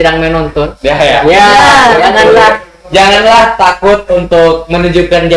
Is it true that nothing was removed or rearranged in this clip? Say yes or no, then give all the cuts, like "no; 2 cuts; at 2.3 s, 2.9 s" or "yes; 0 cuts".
yes; 0 cuts